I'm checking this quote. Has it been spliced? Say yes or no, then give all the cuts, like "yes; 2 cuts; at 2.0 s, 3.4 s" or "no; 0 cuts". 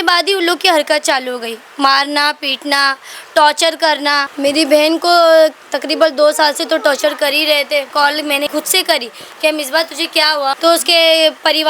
yes; 3 cuts; at 4.3 s, 8.4 s, 10.6 s